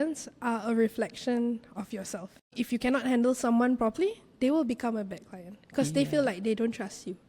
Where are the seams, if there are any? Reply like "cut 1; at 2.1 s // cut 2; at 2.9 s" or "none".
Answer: cut 1; at 2.5 s